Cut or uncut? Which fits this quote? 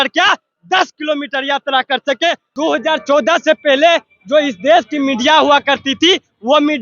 cut